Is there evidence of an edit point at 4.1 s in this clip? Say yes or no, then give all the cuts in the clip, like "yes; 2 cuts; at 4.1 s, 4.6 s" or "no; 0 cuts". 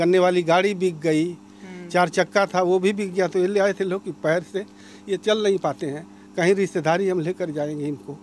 no; 0 cuts